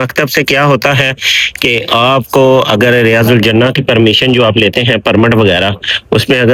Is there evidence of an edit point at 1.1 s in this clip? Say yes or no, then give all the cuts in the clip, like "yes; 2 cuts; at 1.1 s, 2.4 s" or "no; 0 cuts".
no; 0 cuts